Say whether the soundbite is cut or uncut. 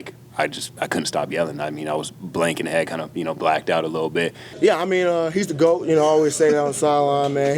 cut